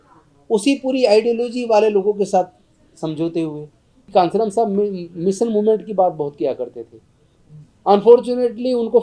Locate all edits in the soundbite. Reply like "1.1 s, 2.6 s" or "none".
4.0 s